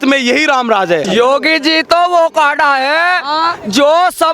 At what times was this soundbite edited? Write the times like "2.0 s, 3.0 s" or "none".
1.1 s